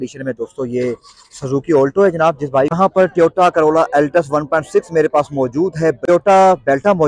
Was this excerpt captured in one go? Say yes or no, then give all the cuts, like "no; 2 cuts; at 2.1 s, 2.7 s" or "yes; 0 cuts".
no; 2 cuts; at 2.7 s, 6.0 s